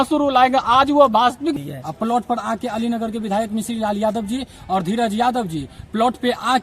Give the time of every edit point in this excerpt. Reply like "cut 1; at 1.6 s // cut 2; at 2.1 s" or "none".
cut 1; at 1.5 s